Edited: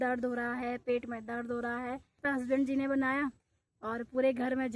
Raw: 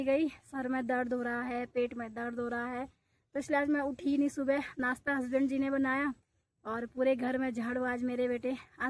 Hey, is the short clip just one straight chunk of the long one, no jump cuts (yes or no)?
no